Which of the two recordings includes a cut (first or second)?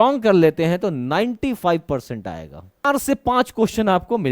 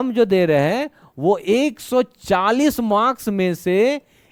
first